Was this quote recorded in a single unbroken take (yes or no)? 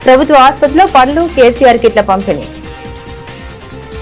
no